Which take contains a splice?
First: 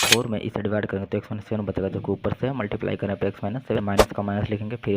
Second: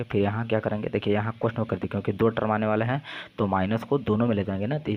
first; 1 cut; at 3.8 s

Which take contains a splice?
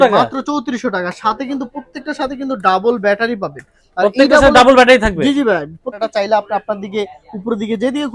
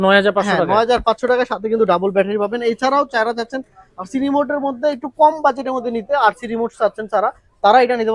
first; 1 cut; at 6.0 s

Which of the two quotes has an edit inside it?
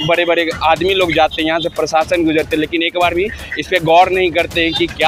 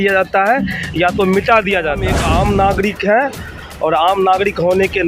second; 1 cut; at 2.1 s

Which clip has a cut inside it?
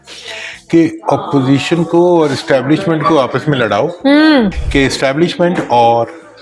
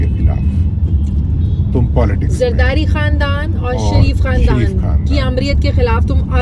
first; 1 cut; at 4.6 s

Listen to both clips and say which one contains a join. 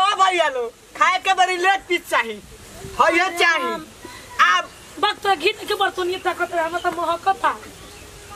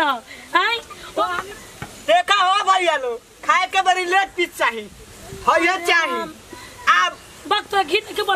second; 1 cut; at 1.4 s

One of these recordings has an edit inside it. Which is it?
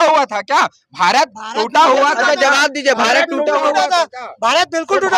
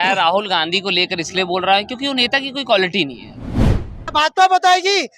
second; 1 cut; at 3.8 s

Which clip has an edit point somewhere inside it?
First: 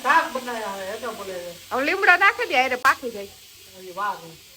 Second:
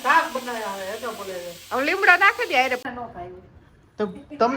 second; 1 cut; at 2.8 s

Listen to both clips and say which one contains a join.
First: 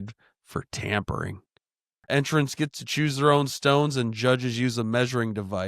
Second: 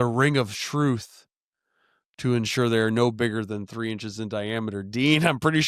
first; 1 cut; at 2.0 s

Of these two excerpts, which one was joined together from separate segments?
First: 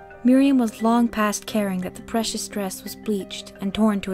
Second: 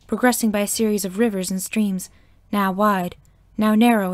second; 1 cut; at 1.1 s

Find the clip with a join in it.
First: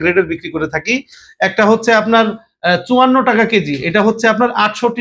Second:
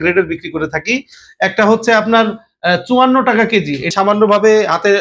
second; 1 cut; at 3.9 s

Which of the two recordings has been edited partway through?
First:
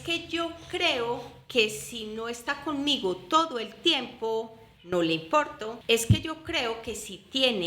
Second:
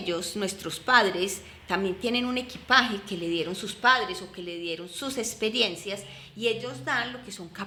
first; 1 cut; at 5.7 s

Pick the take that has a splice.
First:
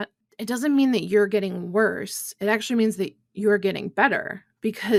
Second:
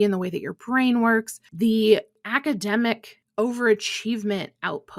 second; 3 cuts; at 1.5 s, 2.2 s, 3.2 s

